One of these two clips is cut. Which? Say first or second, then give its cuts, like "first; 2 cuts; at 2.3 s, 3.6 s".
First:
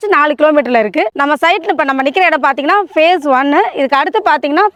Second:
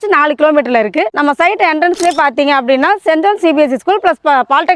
second; 1 cut; at 1.1 s